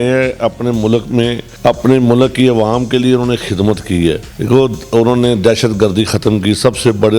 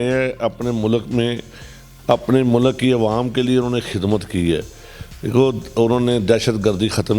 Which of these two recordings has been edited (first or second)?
first